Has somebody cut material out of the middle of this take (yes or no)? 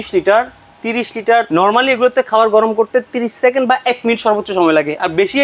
yes